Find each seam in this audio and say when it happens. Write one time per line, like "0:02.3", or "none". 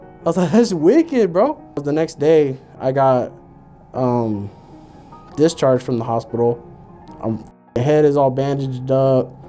0:01.8